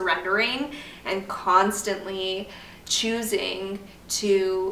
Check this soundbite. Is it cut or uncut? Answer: uncut